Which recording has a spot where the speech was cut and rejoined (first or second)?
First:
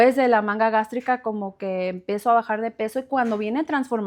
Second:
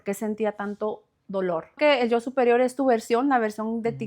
second